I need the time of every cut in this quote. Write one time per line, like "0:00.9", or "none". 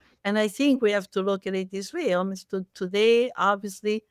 none